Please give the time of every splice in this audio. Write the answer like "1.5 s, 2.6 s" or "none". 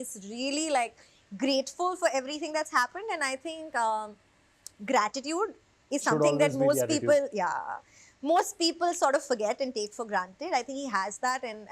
none